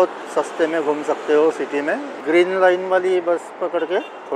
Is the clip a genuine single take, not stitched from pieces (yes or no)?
no